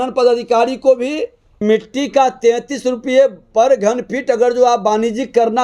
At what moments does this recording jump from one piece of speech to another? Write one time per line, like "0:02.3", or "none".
0:01.6